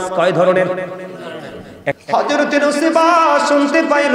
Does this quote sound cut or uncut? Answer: cut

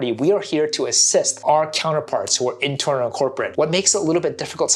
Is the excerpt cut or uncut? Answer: uncut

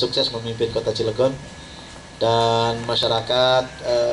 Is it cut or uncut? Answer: uncut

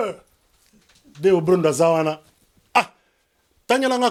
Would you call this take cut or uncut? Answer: uncut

